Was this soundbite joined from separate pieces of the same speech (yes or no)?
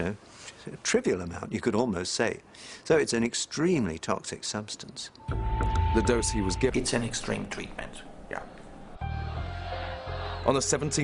no